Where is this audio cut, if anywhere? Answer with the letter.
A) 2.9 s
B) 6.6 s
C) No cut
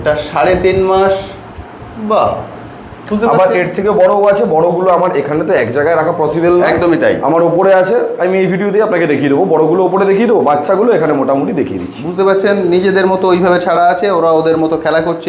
C